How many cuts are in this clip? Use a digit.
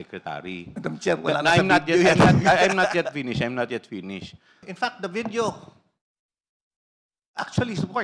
1